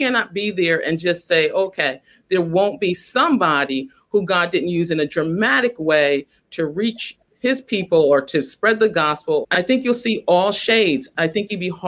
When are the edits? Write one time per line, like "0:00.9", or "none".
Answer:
0:07.2
0:09.4
0:11.1